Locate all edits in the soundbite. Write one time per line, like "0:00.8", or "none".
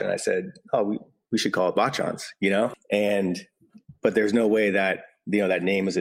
0:02.8